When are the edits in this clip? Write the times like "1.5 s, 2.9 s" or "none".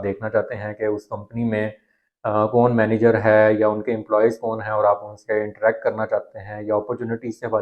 none